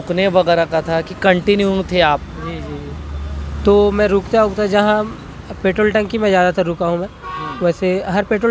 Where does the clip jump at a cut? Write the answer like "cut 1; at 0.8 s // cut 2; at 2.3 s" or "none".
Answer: none